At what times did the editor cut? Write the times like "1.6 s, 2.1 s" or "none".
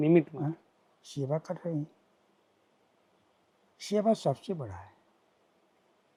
none